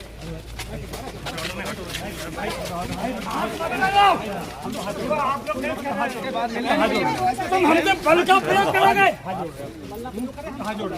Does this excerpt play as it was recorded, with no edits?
no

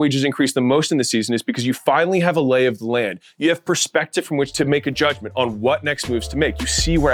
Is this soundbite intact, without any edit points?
yes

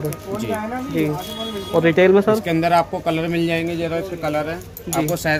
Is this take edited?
no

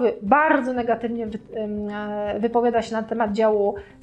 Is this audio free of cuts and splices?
yes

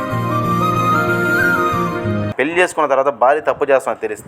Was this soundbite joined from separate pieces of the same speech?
yes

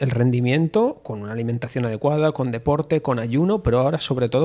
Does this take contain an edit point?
no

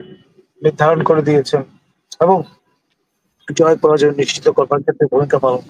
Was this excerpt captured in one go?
yes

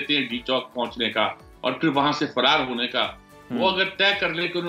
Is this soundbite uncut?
yes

